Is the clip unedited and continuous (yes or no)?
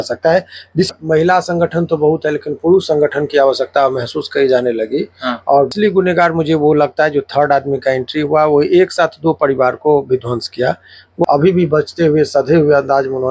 no